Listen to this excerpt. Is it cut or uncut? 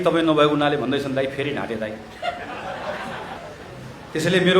cut